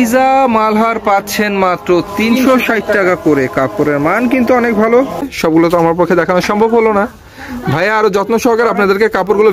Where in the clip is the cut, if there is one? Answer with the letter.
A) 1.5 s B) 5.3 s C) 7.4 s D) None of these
B